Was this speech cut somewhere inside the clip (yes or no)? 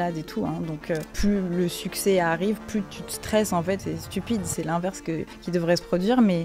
yes